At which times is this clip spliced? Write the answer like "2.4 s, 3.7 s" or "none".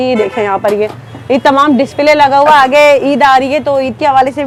none